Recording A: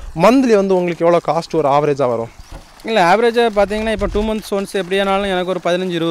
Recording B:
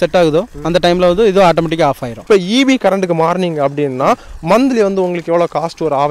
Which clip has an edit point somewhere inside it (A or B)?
B